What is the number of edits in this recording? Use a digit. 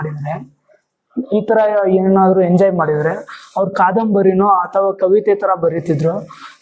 0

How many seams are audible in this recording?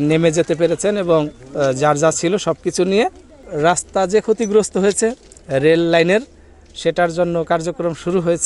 1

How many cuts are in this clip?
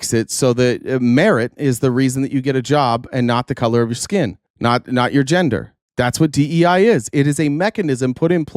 1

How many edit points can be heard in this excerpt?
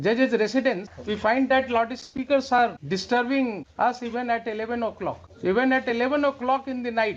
4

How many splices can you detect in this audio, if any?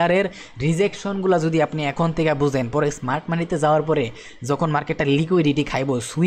0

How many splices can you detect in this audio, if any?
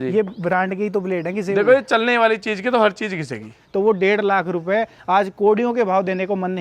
1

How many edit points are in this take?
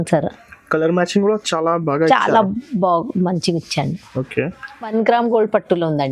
1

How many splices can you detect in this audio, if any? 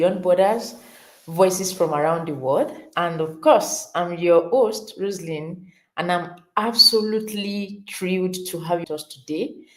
1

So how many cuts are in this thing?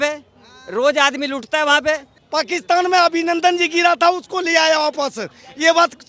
1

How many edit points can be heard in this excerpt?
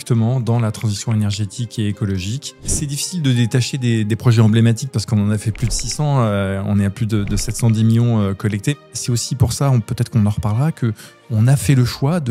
2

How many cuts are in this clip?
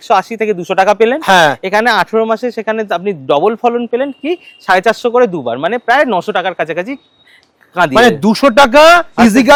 0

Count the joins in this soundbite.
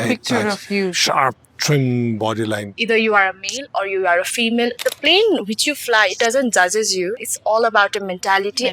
3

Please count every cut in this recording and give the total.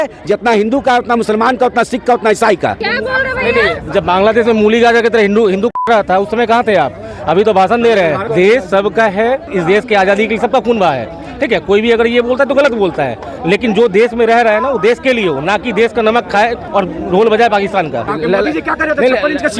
6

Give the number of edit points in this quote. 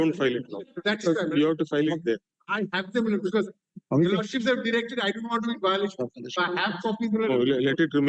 0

